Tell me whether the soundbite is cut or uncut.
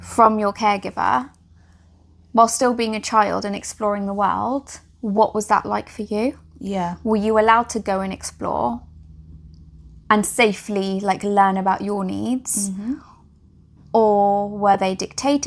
uncut